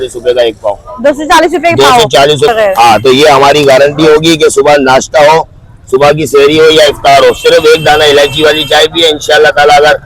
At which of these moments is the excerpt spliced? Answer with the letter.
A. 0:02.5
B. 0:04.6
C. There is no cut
A